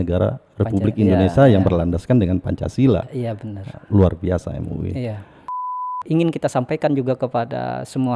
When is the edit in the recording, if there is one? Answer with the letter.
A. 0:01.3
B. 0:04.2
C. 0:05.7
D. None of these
C